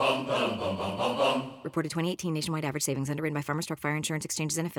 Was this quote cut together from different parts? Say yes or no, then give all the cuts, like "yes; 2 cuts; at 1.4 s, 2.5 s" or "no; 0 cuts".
no; 0 cuts